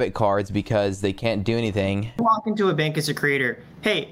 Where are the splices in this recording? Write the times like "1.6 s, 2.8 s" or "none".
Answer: 2.2 s